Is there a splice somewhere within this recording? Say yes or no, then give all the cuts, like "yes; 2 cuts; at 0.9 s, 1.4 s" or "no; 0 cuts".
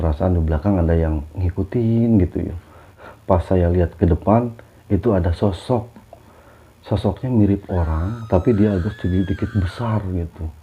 yes; 2 cuts; at 2.9 s, 4.6 s